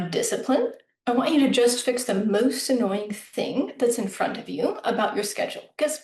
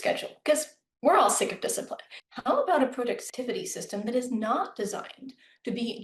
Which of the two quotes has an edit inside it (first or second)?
second